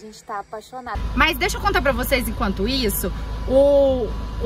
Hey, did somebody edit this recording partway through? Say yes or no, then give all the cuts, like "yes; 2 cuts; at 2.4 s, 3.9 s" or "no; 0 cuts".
yes; 1 cut; at 1.0 s